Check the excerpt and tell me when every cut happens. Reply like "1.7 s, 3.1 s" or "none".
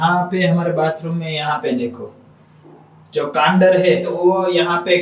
none